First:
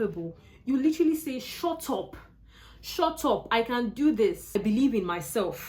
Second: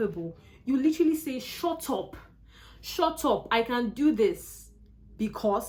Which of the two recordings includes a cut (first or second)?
first